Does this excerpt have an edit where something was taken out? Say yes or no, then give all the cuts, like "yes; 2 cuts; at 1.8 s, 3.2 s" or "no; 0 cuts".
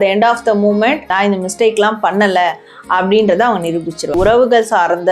yes; 2 cuts; at 1.1 s, 4.1 s